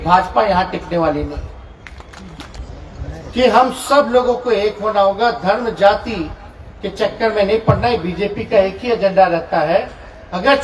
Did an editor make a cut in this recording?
yes; 1 cut; at 2.6 s

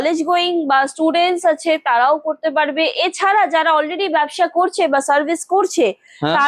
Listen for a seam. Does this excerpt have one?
no; 0 cuts

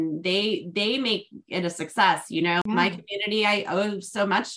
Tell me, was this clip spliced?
yes; 1 cut; at 2.6 s

